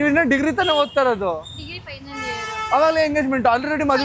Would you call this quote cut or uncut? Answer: cut